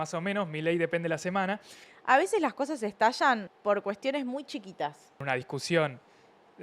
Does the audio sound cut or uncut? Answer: cut